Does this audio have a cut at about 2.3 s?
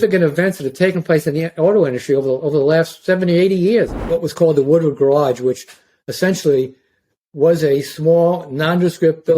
no; 1 cut; at 4.0 s

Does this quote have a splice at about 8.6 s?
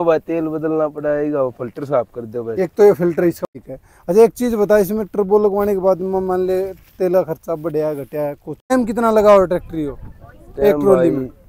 yes; 2 cuts; at 3.5 s, 8.6 s

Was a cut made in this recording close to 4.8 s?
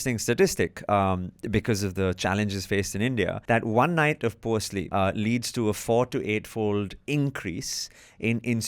yes; 2 cuts; at 3.4 s, 4.8 s

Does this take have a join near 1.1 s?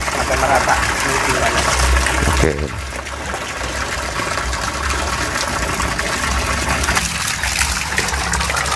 no; 0 cuts

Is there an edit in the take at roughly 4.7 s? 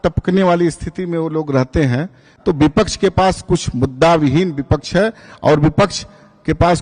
no; 1 cut; at 2.3 s

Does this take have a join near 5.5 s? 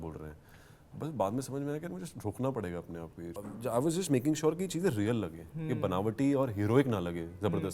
no; 1 cut; at 3.4 s

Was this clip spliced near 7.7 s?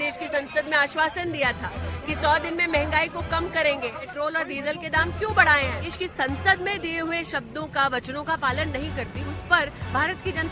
no; 2 cuts; at 4.1 s, 5.8 s

